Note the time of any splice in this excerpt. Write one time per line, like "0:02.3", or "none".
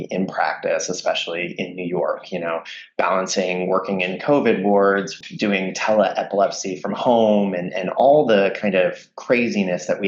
0:05.2